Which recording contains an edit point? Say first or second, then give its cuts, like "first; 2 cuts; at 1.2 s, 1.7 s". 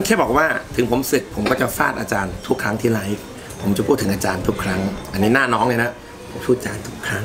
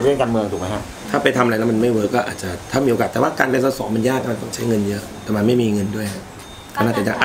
second; 1 cut; at 0.9 s